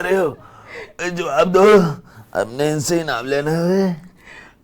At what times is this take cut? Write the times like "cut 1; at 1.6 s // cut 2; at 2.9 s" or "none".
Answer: none